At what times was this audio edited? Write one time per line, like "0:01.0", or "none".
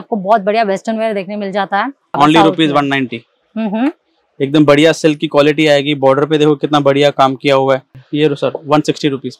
0:02.2
0:08.0